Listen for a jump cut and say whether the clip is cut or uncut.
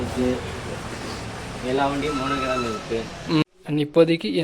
cut